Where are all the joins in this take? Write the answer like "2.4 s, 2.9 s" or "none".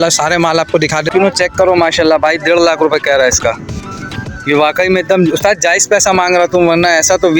1.1 s